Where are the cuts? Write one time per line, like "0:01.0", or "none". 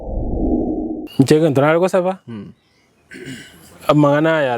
0:01.0